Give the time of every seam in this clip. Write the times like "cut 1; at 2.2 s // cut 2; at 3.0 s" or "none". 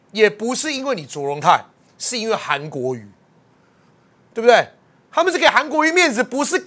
none